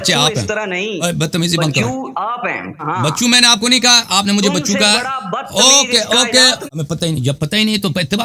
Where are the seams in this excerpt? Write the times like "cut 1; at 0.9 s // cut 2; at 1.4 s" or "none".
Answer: cut 1; at 1.0 s // cut 2; at 2.8 s // cut 3; at 6.6 s